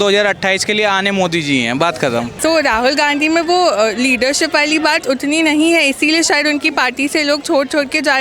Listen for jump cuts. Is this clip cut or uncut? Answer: cut